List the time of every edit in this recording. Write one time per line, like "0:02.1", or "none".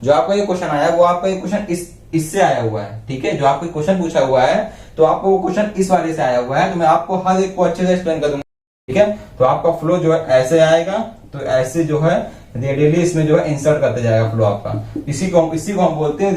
0:08.4